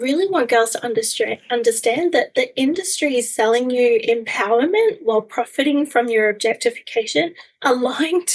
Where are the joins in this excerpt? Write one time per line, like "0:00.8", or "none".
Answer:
none